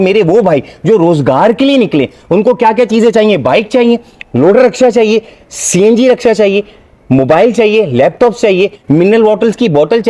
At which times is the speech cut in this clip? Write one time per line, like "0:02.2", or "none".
none